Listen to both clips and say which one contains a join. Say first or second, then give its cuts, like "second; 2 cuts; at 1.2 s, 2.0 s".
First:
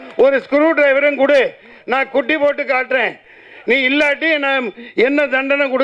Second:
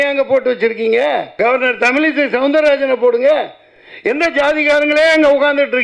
second; 1 cut; at 1.3 s